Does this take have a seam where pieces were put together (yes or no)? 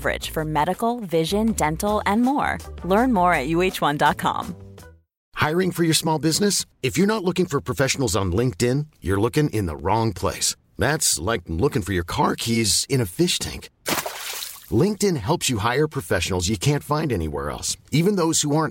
yes